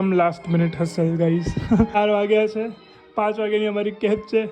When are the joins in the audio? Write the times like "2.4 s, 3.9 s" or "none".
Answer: 2.0 s

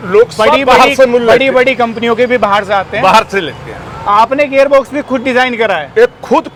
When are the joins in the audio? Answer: none

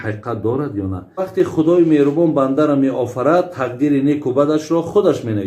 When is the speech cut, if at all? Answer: 1.3 s

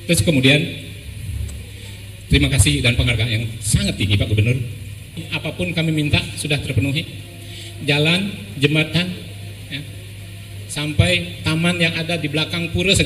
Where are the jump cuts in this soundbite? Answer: 5.3 s

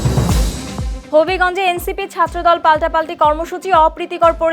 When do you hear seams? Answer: 0.9 s

